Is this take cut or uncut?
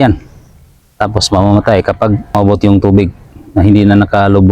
cut